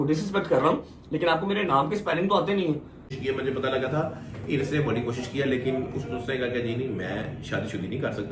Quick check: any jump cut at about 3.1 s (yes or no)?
yes